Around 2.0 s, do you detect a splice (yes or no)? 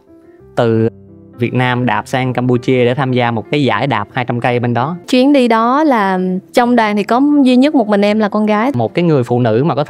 no